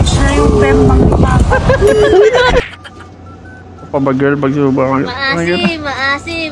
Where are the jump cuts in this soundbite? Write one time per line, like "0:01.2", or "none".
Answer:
0:02.7